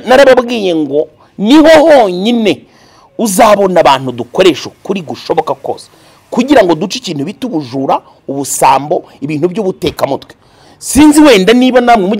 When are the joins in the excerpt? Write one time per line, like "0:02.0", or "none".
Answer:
none

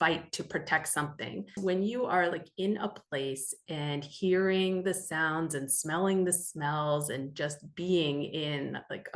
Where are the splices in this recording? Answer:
0:01.6

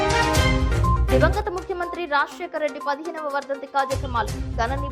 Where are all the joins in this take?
0:01.0

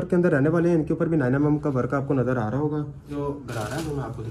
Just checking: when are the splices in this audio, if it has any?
0:03.1

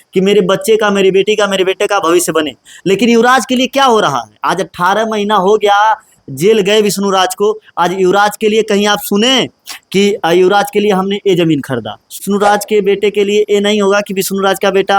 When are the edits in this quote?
0:12.2

